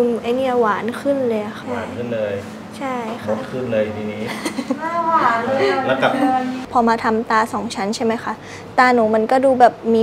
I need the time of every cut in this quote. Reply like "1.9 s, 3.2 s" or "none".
1.6 s, 6.6 s